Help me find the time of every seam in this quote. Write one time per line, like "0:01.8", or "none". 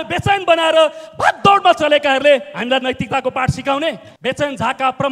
0:04.1

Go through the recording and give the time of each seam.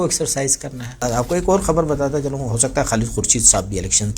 0:01.0

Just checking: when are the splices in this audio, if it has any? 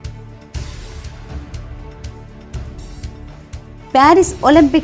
0:03.9

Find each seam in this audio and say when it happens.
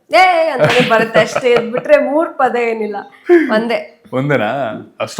none

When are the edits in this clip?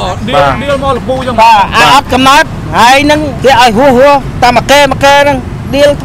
0:03.3

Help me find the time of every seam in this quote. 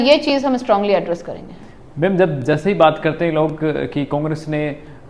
none

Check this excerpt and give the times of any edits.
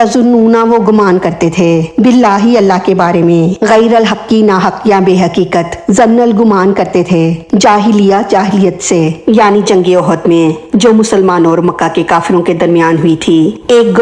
none

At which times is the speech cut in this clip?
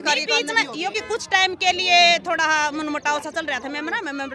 0:01.0

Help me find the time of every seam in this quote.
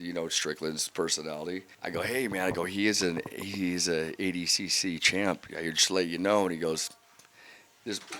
0:01.7

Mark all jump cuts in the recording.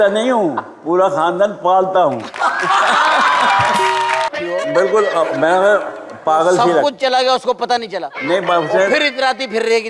0:04.3

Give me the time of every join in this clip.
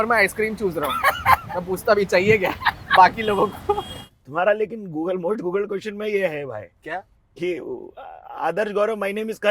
0:03.9

